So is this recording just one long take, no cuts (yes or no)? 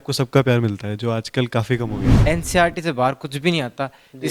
no